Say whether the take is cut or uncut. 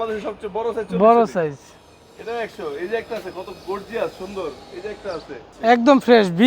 cut